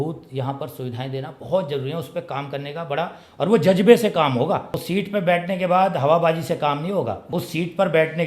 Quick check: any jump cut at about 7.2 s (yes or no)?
yes